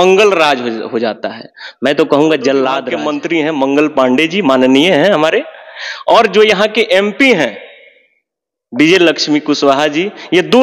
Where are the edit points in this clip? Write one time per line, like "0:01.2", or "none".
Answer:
0:02.9